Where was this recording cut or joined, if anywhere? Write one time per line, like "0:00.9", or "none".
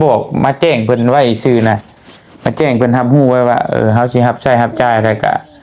none